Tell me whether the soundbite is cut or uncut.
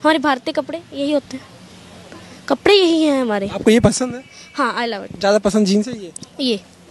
uncut